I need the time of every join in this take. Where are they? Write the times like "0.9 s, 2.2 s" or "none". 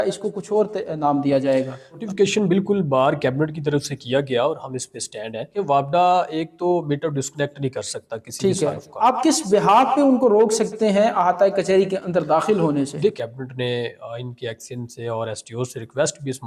2.0 s, 5.5 s, 9.0 s, 13.1 s